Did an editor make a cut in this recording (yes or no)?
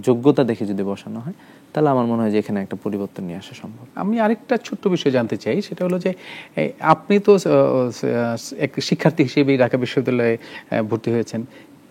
no